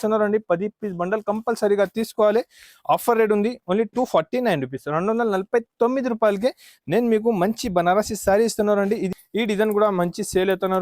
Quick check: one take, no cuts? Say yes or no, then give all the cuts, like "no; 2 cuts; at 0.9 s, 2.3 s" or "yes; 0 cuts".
no; 1 cut; at 9.1 s